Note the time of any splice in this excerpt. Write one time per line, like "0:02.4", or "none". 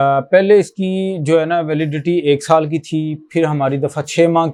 none